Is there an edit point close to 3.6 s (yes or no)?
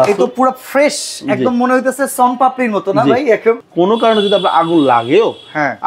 yes